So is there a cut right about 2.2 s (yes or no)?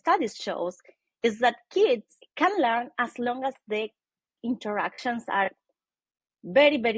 yes